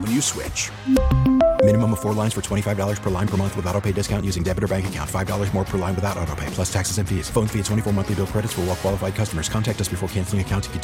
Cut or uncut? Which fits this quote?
uncut